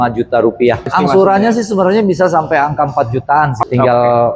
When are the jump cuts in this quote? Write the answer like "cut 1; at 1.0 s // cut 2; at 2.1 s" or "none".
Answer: cut 1; at 0.9 s // cut 2; at 3.6 s

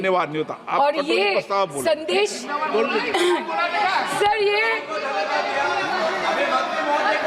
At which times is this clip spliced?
none

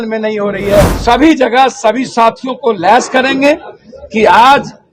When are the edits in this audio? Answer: cut 1; at 0.9 s

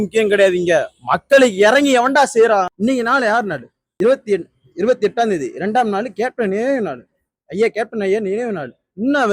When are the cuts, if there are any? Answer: cut 1; at 2.7 s // cut 2; at 3.8 s

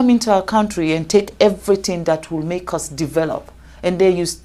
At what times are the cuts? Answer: none

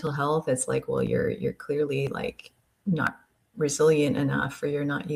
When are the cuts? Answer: none

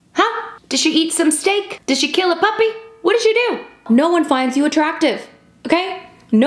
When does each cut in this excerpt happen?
cut 1; at 1.8 s // cut 2; at 3.8 s

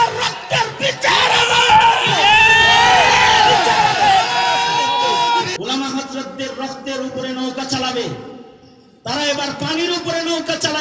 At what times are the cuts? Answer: cut 1; at 5.5 s

